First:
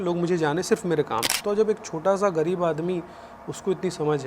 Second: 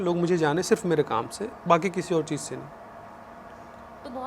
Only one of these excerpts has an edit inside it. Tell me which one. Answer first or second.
first